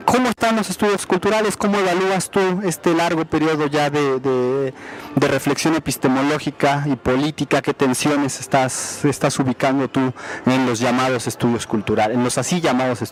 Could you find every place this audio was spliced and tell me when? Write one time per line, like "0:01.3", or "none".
none